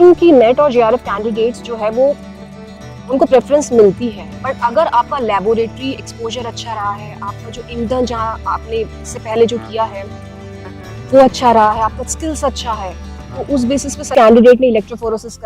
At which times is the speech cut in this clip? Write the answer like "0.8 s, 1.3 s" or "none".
14.1 s